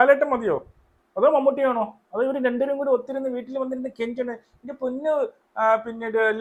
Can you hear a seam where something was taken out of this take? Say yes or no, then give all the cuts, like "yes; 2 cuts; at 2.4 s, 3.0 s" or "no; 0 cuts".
no; 0 cuts